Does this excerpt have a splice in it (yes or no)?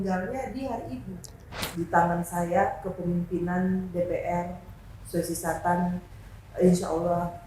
yes